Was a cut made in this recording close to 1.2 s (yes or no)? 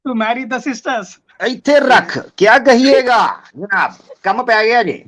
yes